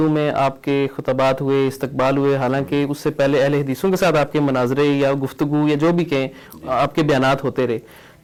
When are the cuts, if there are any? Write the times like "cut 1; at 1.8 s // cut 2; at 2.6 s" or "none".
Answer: none